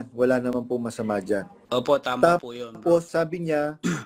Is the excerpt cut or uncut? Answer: cut